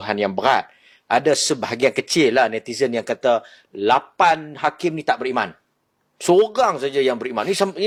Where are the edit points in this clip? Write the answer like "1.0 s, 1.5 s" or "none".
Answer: none